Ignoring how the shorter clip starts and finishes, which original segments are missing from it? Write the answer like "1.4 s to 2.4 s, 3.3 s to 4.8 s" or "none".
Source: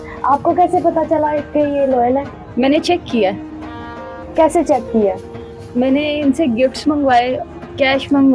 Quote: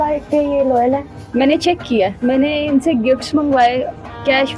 3.4 s to 5.7 s